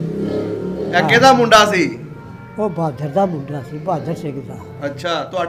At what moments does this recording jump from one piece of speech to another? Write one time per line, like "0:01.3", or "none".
none